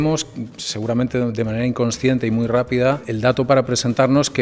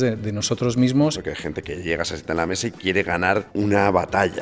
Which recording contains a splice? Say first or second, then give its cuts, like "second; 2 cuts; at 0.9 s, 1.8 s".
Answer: second; 2 cuts; at 1.2 s, 3.5 s